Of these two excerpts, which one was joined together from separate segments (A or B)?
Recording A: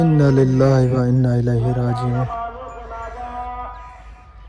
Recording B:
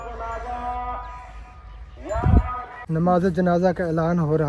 B